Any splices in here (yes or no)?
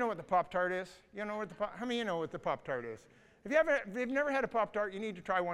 no